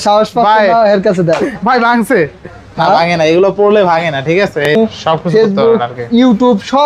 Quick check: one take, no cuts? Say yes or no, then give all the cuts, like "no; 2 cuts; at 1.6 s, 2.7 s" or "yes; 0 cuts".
no; 1 cut; at 4.8 s